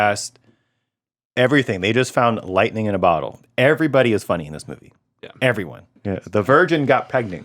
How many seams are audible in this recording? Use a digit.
1